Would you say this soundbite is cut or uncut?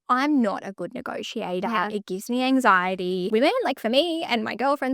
cut